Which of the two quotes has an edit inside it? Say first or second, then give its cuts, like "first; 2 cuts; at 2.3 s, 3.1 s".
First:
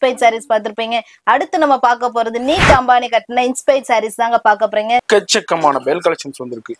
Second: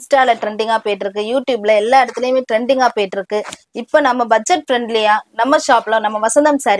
first; 1 cut; at 5.0 s